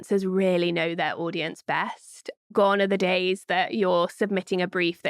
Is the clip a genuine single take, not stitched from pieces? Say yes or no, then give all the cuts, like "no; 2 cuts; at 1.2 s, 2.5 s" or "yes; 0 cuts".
no; 1 cut; at 2.3 s